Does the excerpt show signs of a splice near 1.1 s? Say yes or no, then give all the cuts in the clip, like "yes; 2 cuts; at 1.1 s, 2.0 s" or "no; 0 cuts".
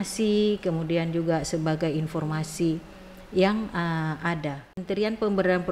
no; 1 cut; at 4.8 s